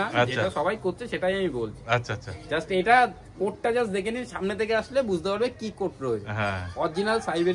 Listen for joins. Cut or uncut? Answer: uncut